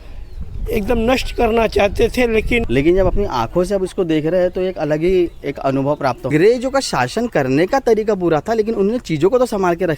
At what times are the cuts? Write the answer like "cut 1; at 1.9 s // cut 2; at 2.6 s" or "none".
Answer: cut 1; at 2.7 s // cut 2; at 6.3 s